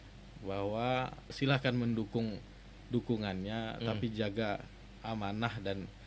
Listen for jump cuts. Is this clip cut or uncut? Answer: cut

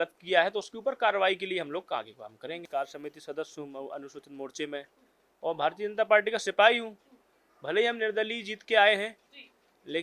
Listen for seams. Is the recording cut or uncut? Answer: cut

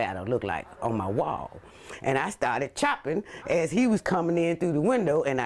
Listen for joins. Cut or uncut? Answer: cut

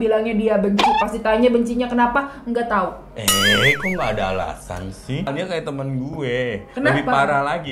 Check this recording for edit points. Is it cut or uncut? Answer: cut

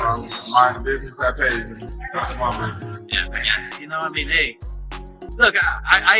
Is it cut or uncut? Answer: cut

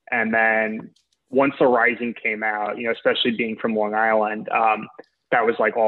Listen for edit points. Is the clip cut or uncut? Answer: uncut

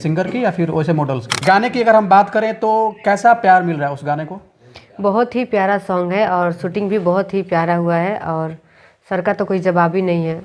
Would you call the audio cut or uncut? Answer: cut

